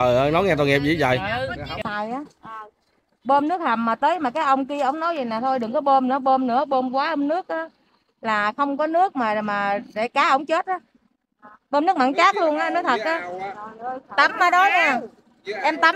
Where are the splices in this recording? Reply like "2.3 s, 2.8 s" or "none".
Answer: 1.8 s